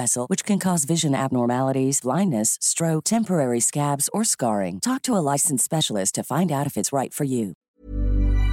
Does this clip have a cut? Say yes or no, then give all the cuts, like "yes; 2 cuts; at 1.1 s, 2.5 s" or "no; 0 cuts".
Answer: yes; 1 cut; at 7.6 s